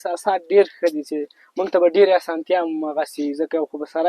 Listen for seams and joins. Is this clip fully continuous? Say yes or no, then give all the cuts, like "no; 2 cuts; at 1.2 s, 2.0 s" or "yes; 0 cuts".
yes; 0 cuts